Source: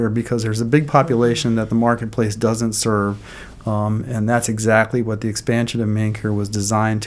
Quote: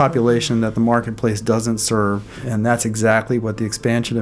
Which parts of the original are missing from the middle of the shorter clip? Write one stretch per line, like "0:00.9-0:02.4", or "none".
0:03.4-0:04.0